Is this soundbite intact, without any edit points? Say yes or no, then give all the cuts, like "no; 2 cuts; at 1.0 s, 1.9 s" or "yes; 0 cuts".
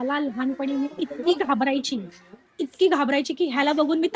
yes; 0 cuts